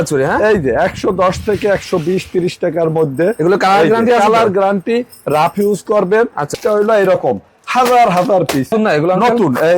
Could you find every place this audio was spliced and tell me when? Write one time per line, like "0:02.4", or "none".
0:06.5
0:08.7